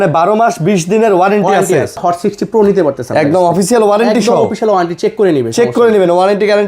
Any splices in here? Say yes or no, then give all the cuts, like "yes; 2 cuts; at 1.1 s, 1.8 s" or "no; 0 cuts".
yes; 1 cut; at 2.0 s